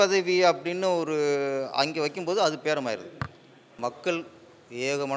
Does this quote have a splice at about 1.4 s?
no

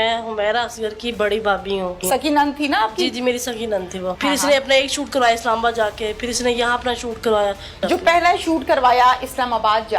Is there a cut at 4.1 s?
yes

